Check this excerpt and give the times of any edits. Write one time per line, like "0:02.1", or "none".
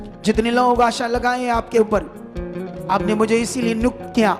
0:02.7